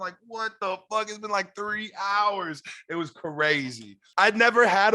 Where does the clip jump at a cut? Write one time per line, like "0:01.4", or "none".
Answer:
0:04.0